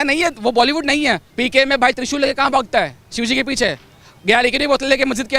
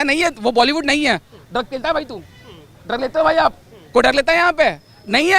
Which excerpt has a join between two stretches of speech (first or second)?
first